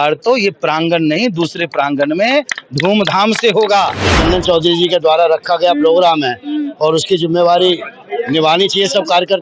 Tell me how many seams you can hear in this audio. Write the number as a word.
one